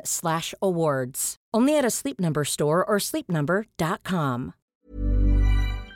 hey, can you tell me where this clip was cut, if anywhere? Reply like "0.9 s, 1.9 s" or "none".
4.6 s